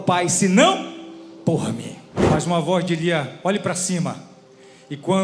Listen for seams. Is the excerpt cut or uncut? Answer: cut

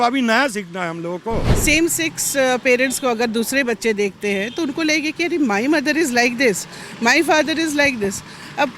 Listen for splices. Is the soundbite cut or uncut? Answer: cut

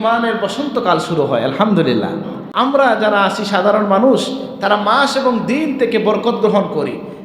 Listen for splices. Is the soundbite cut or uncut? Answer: cut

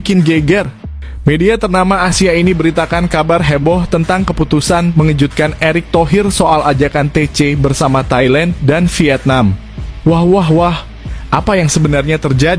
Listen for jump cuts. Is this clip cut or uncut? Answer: uncut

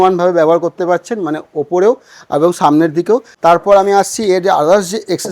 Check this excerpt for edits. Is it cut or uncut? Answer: cut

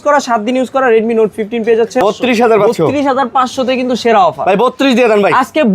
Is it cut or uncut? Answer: cut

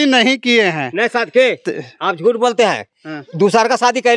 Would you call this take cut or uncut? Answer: uncut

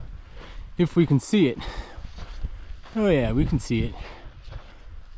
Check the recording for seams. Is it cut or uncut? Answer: uncut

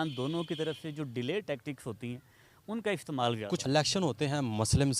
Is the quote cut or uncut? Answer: cut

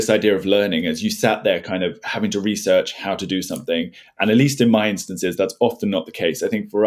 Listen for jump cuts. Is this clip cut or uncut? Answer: uncut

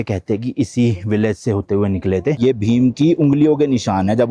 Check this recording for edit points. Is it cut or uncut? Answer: cut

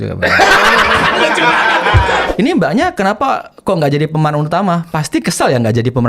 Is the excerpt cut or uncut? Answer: cut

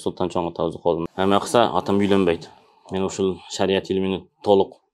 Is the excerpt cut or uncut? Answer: cut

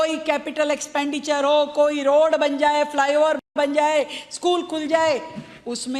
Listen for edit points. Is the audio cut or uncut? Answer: uncut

